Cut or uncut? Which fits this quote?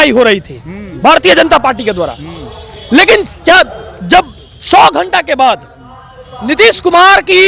uncut